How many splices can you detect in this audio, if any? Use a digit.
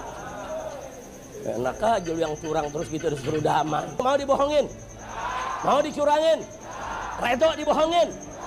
1